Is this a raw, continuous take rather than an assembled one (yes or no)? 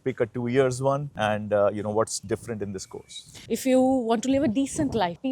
no